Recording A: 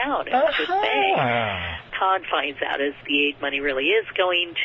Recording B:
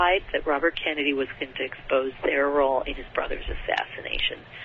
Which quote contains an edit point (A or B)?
A